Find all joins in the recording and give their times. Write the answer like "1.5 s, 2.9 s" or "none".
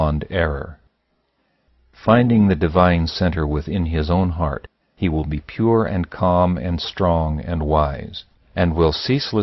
2.0 s